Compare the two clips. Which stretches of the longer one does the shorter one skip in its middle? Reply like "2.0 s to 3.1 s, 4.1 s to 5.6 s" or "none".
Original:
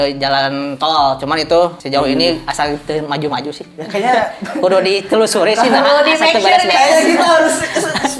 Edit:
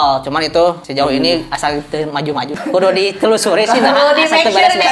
3.5 s to 4.4 s

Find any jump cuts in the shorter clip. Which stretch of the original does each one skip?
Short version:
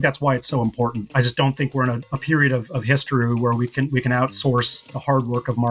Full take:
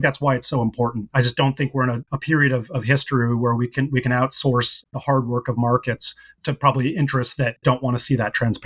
none

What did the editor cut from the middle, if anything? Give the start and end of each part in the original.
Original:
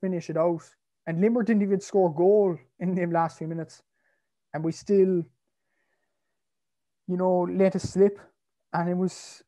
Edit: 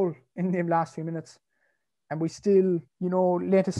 5.3 s to 7.0 s

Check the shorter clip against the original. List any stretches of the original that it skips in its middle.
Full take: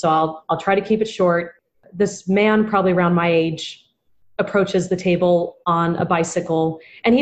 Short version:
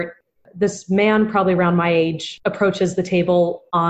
3.7 s to 4.2 s

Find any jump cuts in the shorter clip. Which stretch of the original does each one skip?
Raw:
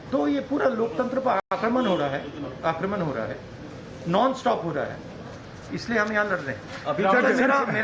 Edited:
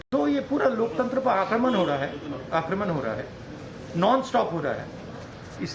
1.4 s to 1.5 s

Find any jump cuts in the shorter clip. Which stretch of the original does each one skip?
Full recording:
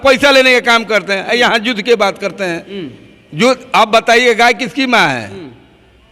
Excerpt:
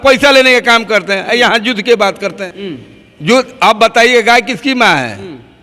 2.5 s to 2.7 s

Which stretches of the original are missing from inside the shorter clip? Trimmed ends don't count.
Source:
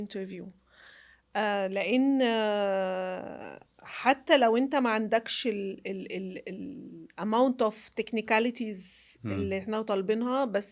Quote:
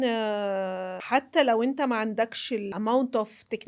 3.1 s to 3.9 s, 5.6 s to 7.2 s

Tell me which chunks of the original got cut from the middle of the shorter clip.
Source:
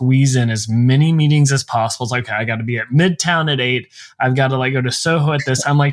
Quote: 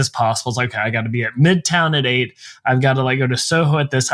none

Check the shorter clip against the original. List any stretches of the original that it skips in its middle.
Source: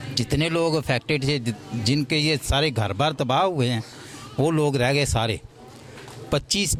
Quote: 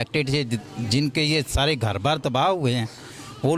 none

